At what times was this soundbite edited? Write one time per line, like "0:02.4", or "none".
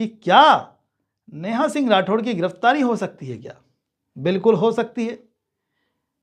none